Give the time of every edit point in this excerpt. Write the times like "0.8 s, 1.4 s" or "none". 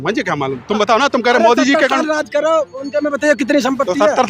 none